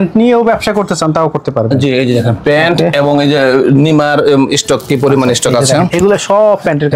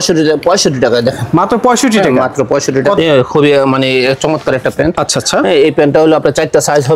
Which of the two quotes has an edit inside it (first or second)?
second